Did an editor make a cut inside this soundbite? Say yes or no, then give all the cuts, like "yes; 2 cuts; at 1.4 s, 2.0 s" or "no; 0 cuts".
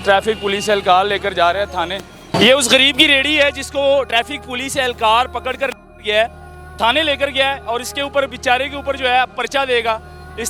yes; 1 cut; at 2.2 s